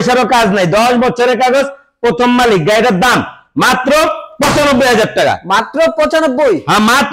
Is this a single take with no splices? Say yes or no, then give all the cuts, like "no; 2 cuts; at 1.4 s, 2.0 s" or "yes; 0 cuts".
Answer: yes; 0 cuts